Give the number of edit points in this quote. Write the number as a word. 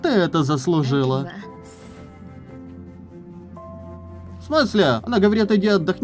one